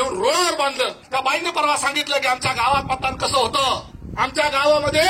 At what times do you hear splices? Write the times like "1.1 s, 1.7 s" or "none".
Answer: 1.0 s, 4.0 s